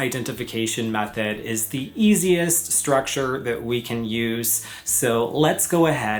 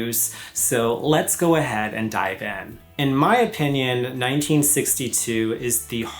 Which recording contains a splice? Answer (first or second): second